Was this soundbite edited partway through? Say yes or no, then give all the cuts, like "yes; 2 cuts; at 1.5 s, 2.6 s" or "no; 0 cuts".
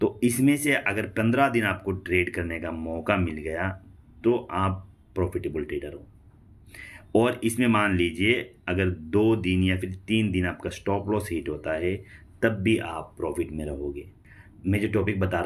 no; 0 cuts